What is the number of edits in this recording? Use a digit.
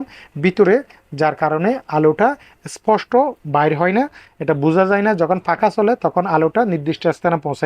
0